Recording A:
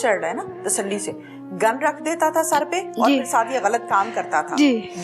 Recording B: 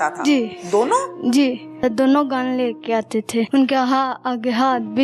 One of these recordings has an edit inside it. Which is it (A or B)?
B